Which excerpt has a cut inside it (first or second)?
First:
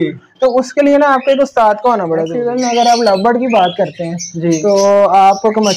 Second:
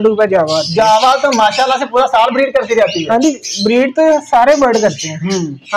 first